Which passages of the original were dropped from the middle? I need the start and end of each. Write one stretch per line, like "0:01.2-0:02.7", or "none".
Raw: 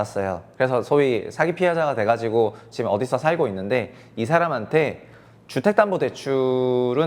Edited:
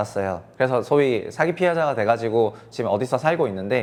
none